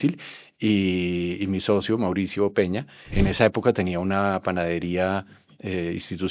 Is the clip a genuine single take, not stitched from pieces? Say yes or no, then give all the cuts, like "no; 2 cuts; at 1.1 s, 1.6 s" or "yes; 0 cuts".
no; 1 cut; at 3.0 s